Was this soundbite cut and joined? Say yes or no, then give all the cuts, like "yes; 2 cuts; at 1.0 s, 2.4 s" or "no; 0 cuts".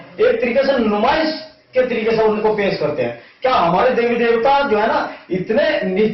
no; 0 cuts